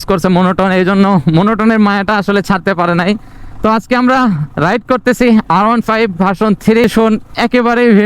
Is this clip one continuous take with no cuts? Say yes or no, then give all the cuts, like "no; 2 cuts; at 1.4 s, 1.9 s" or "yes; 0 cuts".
no; 1 cut; at 6.9 s